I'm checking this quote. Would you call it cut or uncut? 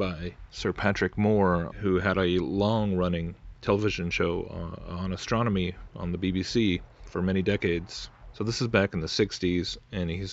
cut